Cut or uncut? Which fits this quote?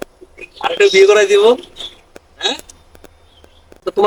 uncut